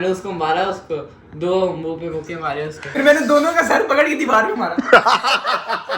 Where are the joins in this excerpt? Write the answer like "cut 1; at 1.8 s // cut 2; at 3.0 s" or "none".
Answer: cut 1; at 2.9 s